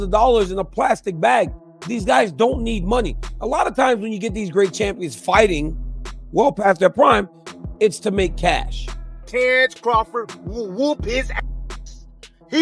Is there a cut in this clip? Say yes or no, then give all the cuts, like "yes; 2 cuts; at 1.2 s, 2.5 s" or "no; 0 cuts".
yes; 1 cut; at 9.2 s